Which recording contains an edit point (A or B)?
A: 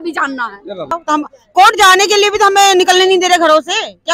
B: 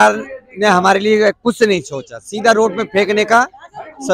A